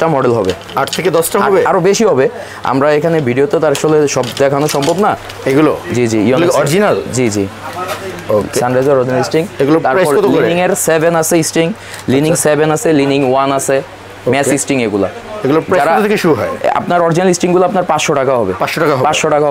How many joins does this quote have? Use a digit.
1